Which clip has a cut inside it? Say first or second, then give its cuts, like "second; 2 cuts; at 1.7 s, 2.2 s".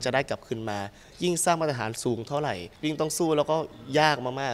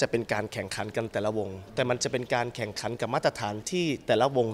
first; 2 cuts; at 1.0 s, 2.7 s